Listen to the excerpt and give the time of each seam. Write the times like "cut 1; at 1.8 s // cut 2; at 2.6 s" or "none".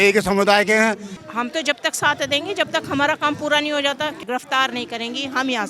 cut 1; at 1.1 s // cut 2; at 4.2 s